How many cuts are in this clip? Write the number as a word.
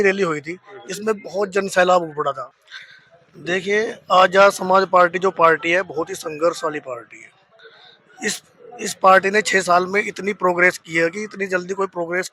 one